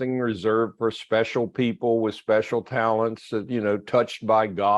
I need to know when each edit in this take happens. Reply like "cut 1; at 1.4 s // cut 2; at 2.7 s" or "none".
none